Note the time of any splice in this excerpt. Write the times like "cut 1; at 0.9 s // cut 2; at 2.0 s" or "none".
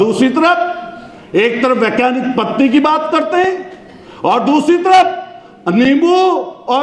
none

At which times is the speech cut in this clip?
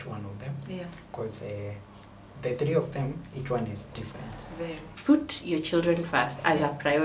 cut 1; at 4.9 s

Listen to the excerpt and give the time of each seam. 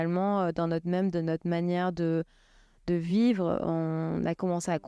none

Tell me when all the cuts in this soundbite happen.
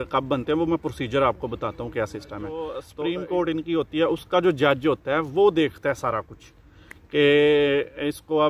cut 1; at 2.8 s

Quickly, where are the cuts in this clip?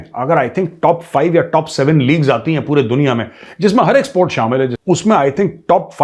cut 1; at 4.8 s

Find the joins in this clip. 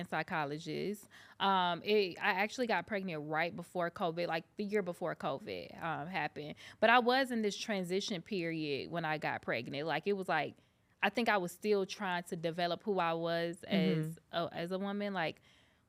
none

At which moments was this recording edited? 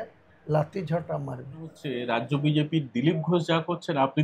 cut 1; at 1.9 s

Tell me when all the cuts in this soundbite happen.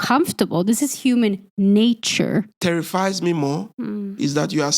cut 1; at 2.5 s

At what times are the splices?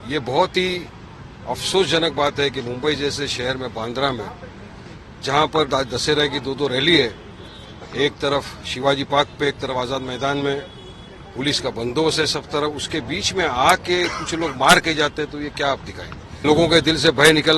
cut 1; at 16.4 s

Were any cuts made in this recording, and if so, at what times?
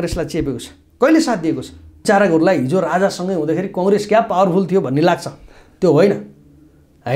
cut 1; at 2.0 s

